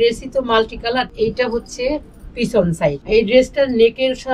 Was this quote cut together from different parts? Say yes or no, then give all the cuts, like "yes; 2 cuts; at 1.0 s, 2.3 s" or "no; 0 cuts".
yes; 2 cuts; at 1.1 s, 3.0 s